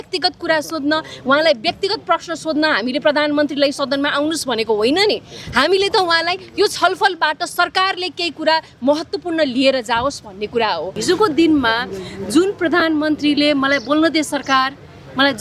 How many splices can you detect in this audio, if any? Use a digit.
1